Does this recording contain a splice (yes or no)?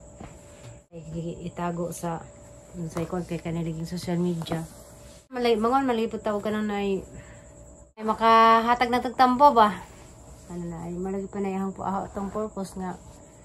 yes